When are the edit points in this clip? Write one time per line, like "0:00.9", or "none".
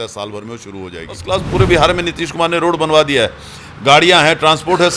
0:01.2

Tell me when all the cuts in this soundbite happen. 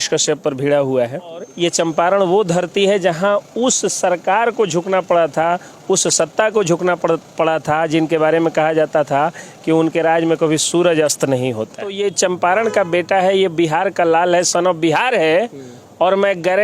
0:01.5
0:11.9

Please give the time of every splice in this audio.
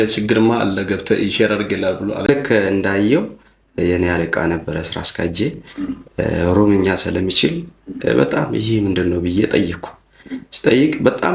0:02.3

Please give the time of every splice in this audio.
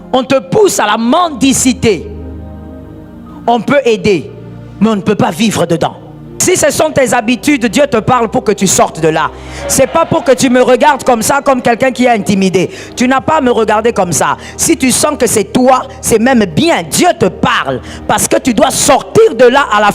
0:02.1
0:03.5
0:06.4

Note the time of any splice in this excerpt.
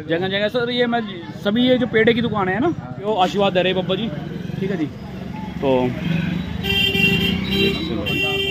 0:02.9

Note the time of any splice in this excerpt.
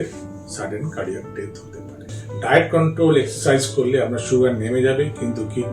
0:02.2

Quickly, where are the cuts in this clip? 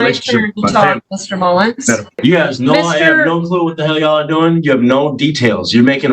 0:02.2

